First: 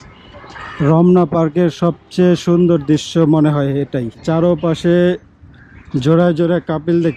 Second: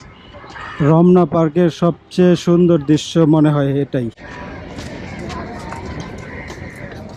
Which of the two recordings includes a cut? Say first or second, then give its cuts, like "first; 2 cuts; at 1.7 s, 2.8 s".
first; 1 cut; at 4.2 s